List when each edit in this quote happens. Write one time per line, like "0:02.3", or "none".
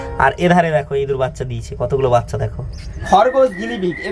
0:03.0